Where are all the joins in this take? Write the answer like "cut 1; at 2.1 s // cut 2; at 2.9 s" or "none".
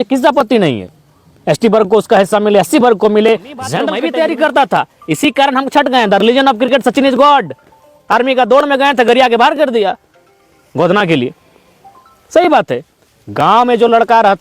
cut 1; at 3.8 s